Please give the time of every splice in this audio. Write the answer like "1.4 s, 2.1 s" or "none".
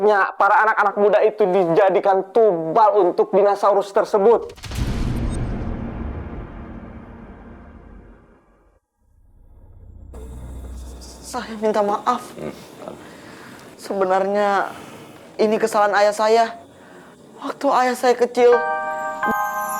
18.6 s